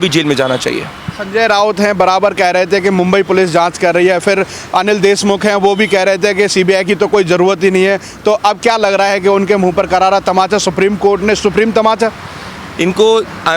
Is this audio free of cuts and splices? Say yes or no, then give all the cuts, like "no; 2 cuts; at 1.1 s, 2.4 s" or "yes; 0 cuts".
yes; 0 cuts